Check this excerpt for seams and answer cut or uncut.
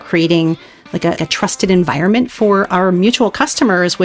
cut